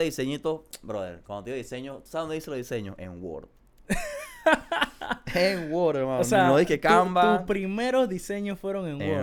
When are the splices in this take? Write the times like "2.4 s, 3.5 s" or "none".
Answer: none